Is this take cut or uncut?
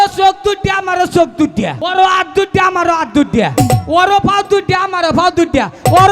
cut